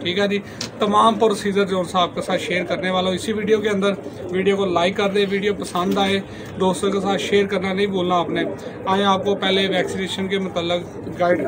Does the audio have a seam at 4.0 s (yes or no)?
no